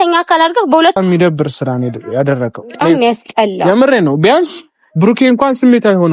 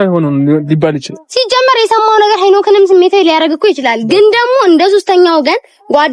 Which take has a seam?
first; 1 cut; at 1.0 s

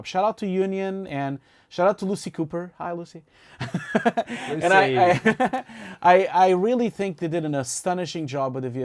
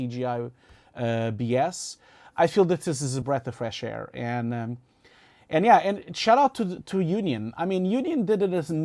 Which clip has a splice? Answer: second; 1 cut; at 3.2 s

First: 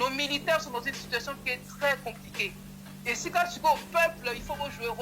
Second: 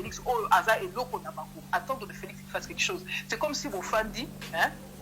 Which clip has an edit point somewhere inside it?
second; 1 cut; at 1.6 s

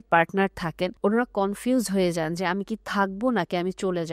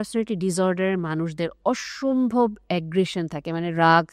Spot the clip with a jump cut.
first; 1 cut; at 0.9 s

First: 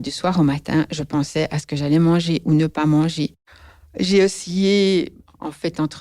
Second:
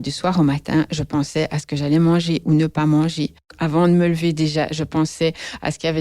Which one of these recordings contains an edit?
second; 1 cut; at 3.4 s

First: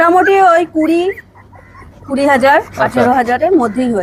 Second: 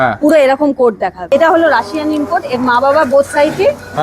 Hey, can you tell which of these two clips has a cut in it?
second; 1 cut; at 1.3 s

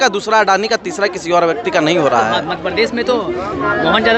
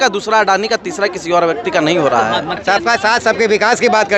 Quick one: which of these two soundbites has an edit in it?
second; 1 cut; at 2.5 s

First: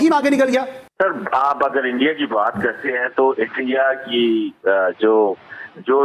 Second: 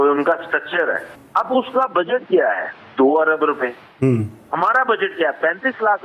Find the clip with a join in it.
second; 1 cut; at 1.2 s

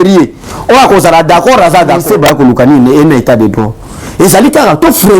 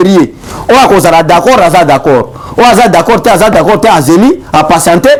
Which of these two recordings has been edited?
first; 1 cut; at 2.0 s

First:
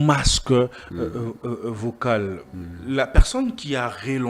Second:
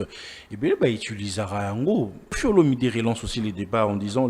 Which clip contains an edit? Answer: second; 1 cut; at 2.4 s

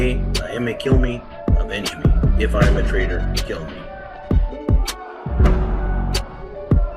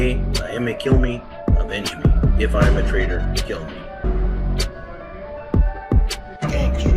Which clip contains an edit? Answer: first; 1 cut; at 3.9 s

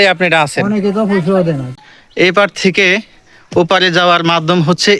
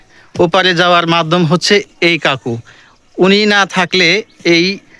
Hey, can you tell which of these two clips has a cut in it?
first; 1 cut; at 1.8 s

